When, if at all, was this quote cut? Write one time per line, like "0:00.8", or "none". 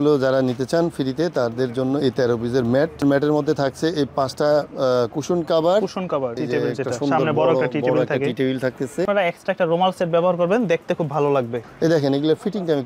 0:03.0
0:06.4
0:09.1
0:11.6